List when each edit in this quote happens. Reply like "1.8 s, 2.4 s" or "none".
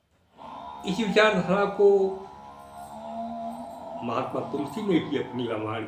none

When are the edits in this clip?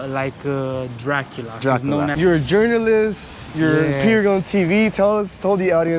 2.1 s

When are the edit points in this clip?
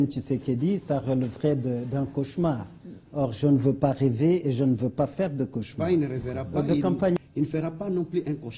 5.7 s

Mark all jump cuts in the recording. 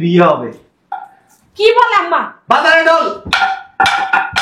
none

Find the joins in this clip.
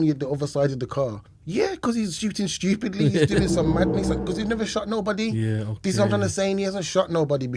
1.3 s

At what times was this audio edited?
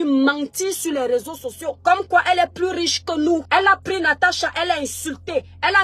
1.8 s, 3.4 s

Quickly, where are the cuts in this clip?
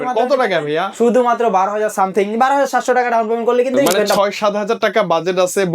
4.2 s

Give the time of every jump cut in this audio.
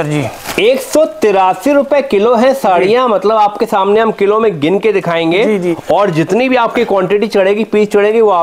none

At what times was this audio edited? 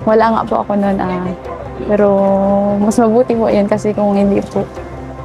none

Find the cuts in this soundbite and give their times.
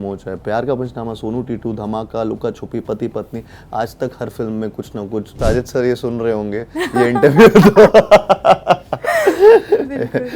5.3 s

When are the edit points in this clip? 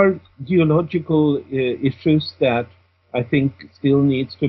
none

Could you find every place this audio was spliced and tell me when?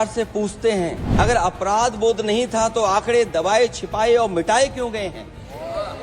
1.0 s

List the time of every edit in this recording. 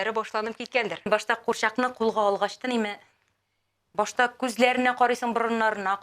1.1 s

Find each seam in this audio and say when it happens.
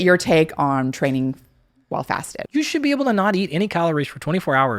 2.4 s

